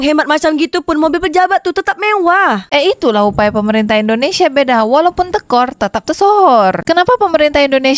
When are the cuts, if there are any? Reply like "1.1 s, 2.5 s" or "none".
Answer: 6.8 s